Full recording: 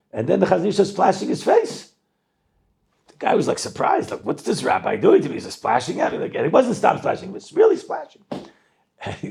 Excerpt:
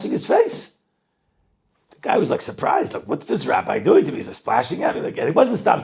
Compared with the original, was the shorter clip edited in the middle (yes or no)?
no